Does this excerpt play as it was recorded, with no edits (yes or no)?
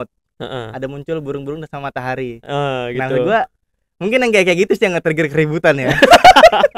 yes